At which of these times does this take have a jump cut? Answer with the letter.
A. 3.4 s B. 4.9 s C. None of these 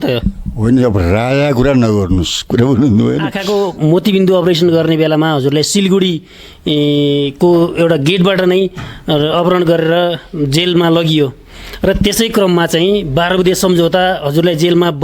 A